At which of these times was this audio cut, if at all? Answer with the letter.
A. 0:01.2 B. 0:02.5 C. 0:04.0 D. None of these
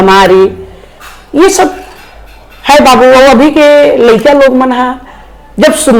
D